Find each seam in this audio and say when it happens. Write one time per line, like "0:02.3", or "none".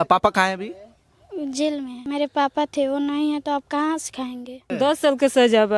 0:02.0
0:04.7